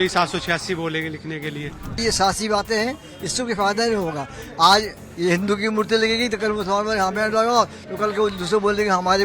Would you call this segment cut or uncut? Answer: cut